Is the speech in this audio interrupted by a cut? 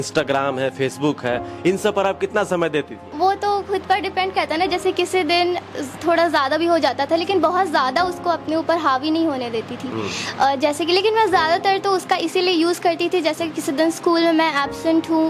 yes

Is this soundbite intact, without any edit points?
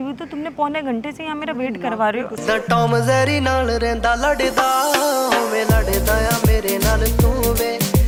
yes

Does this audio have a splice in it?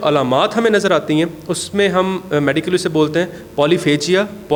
no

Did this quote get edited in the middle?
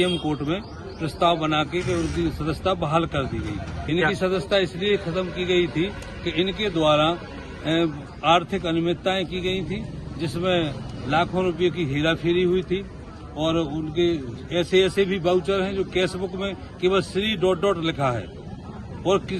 yes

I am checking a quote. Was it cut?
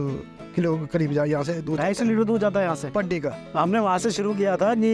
yes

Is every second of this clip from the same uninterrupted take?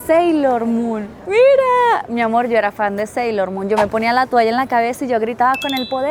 yes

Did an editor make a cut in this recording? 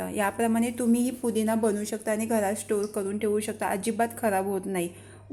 no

